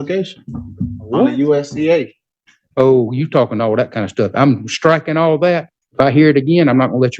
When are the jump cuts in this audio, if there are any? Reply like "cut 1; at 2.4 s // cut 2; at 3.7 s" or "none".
cut 1; at 5.8 s